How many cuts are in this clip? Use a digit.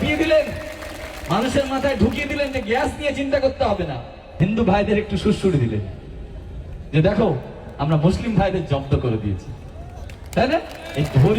1